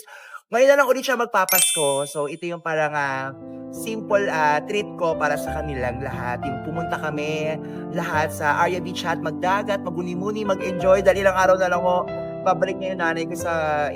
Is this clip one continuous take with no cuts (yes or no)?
yes